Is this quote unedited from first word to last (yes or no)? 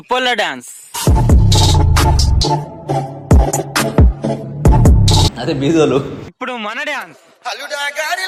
yes